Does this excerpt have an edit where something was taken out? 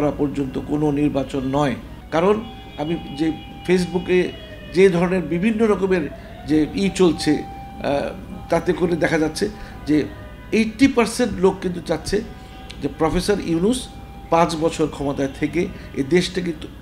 yes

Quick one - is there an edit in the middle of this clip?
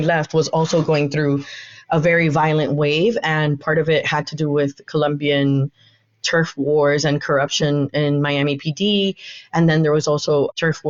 no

